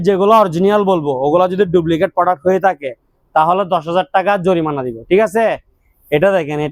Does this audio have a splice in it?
no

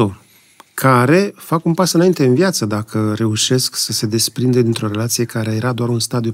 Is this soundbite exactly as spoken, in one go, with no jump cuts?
yes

